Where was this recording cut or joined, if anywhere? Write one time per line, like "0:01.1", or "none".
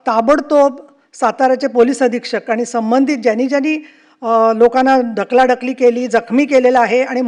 none